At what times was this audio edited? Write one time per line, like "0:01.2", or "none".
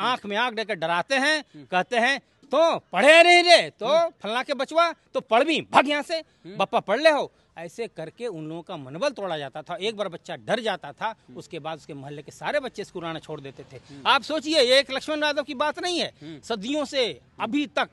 none